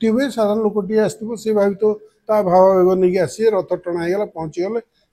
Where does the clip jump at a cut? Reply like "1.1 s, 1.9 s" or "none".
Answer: none